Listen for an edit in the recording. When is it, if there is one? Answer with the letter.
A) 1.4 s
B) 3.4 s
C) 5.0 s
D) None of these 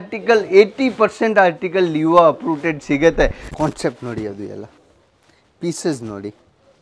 B